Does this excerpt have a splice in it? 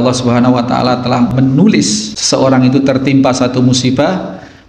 yes; 2 cuts; at 1.3 s, 2.1 s

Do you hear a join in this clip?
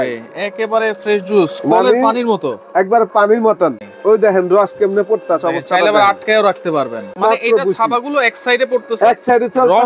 yes; 2 cuts; at 3.9 s, 7.1 s

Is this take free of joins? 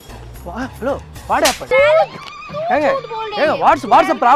no; 1 cut; at 1.6 s

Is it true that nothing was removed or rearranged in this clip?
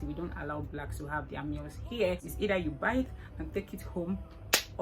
no; 1 cut; at 2.3 s

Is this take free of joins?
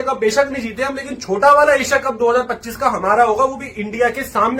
yes; 0 cuts

